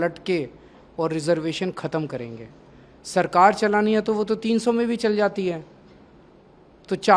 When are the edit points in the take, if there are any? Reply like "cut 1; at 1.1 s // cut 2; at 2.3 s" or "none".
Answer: none